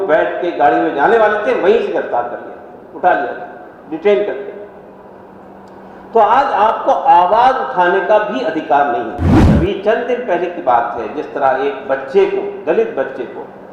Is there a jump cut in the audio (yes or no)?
yes